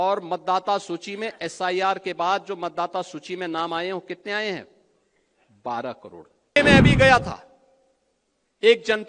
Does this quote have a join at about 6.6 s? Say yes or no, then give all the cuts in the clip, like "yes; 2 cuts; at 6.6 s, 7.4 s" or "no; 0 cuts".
yes; 1 cut; at 6.6 s